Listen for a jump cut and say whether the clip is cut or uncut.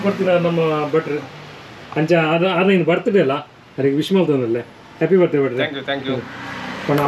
uncut